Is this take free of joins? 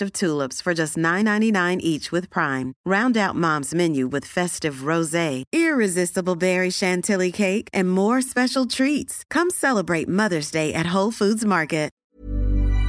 no; 1 cut; at 12.0 s

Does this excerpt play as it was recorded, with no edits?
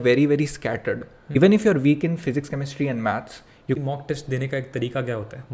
no; 2 cuts; at 1.4 s, 3.8 s

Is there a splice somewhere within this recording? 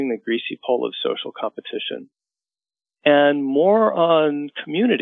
no; 0 cuts

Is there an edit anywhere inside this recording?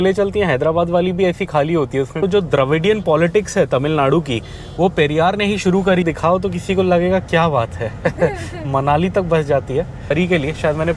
yes; 3 cuts; at 2.2 s, 6.0 s, 10.1 s

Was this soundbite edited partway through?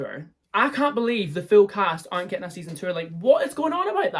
no; 0 cuts

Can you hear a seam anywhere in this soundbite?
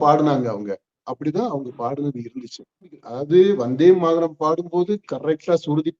yes; 1 cut; at 3.1 s

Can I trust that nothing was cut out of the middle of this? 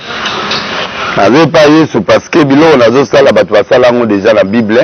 yes; 0 cuts

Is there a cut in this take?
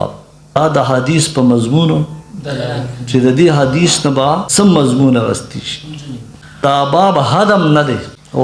yes; 2 cuts; at 4.5 s, 6.6 s

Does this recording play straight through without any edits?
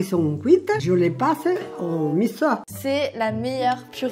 no; 1 cut; at 2.6 s

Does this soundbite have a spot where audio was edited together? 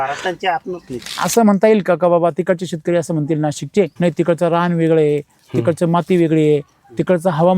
yes; 2 cuts; at 1.2 s, 3.9 s

